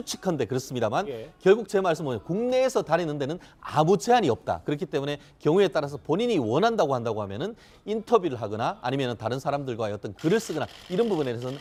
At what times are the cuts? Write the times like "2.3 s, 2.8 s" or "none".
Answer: none